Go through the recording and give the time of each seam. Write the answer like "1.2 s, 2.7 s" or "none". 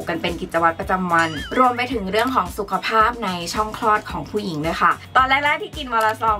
1.5 s, 5.0 s